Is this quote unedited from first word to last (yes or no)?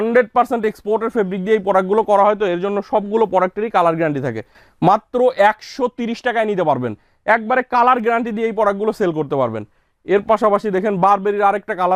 yes